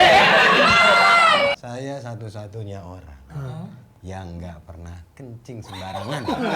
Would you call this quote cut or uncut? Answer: cut